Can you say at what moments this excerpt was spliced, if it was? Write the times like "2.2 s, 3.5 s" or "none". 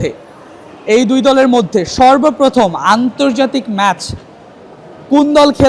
none